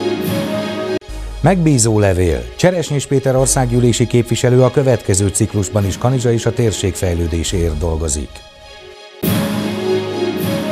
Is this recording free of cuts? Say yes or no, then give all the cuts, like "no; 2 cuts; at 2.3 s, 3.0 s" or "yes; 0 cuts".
no; 1 cut; at 0.9 s